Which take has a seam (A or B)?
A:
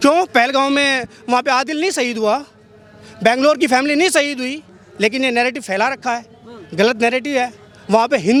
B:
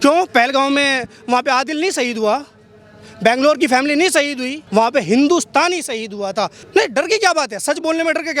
B